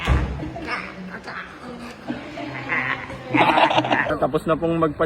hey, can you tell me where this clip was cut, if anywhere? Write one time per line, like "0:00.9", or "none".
0:04.1